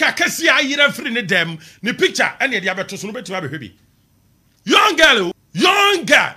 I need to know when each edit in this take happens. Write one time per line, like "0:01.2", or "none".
0:05.4